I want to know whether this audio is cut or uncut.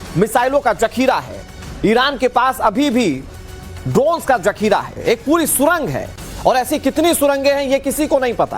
cut